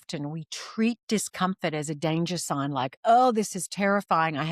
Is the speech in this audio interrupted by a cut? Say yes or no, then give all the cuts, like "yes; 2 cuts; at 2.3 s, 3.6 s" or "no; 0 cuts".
no; 0 cuts